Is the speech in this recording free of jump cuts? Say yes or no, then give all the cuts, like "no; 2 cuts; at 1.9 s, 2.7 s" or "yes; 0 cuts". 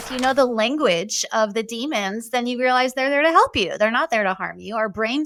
yes; 0 cuts